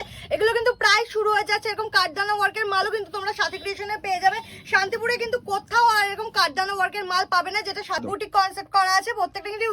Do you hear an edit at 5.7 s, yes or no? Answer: no